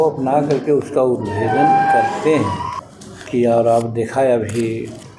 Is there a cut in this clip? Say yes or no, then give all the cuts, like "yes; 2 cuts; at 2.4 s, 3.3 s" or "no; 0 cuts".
yes; 1 cut; at 2.7 s